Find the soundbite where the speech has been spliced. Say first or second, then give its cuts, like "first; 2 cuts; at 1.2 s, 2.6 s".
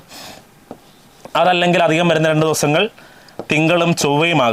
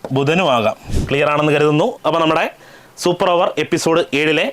second; 1 cut; at 0.9 s